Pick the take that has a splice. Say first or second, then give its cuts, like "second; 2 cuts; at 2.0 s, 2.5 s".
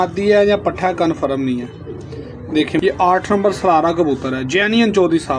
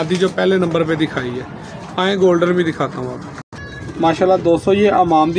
first; 1 cut; at 2.8 s